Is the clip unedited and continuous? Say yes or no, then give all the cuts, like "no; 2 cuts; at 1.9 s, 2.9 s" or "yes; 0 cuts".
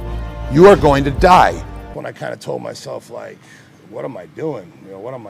no; 1 cut; at 1.9 s